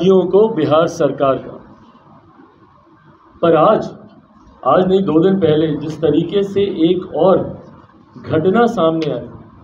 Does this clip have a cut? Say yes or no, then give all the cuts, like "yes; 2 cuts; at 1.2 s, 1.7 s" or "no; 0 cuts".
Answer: no; 0 cuts